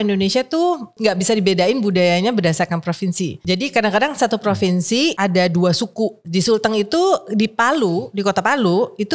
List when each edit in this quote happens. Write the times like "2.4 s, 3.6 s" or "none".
0.9 s, 3.4 s, 5.2 s, 6.2 s